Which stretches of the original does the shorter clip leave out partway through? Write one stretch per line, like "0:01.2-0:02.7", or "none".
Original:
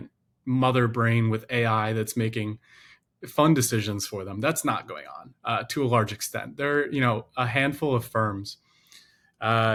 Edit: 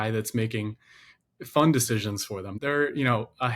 0:04.3-0:06.5